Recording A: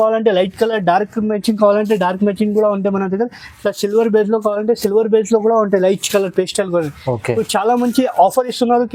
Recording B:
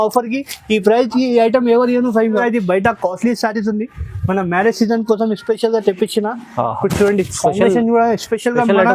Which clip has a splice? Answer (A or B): B